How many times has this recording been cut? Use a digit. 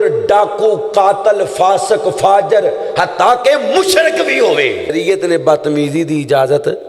1